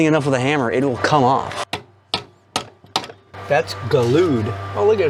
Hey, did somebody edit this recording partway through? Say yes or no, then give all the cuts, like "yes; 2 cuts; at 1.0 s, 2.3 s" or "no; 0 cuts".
no; 0 cuts